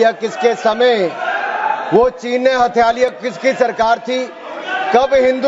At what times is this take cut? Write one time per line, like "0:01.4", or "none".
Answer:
none